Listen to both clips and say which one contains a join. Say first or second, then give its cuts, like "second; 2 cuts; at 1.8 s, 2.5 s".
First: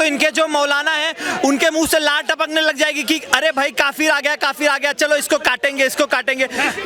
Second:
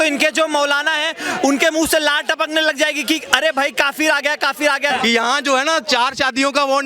second; 1 cut; at 4.9 s